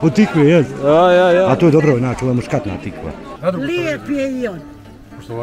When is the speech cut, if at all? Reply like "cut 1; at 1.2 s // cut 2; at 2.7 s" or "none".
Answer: cut 1; at 3.3 s